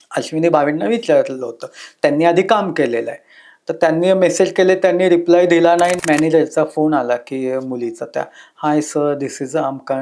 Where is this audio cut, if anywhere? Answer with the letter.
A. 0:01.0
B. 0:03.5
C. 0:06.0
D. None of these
C